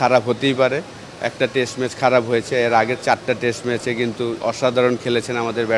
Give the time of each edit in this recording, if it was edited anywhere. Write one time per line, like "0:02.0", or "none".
none